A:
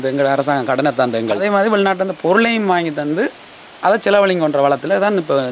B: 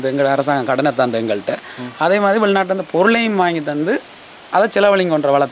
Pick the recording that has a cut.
A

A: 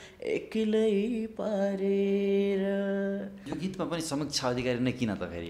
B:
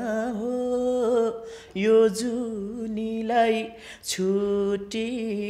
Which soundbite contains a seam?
A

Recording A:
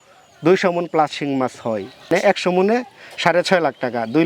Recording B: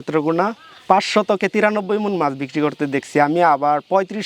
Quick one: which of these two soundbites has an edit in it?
A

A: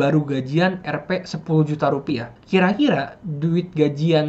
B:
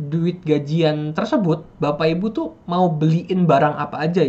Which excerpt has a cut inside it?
A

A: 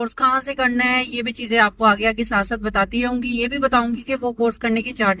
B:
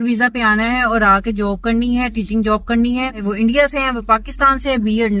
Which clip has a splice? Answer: B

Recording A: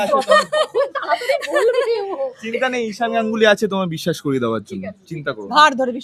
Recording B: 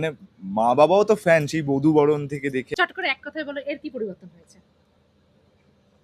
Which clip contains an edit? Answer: B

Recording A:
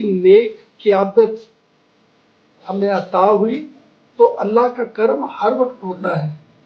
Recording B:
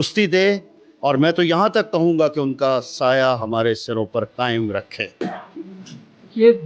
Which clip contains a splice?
B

